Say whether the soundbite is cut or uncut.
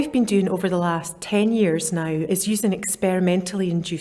cut